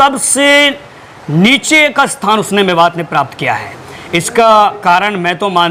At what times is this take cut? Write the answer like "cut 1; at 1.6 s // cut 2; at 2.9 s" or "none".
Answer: none